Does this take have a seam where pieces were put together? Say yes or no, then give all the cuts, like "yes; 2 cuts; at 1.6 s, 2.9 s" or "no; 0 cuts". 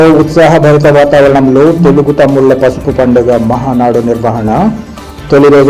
no; 0 cuts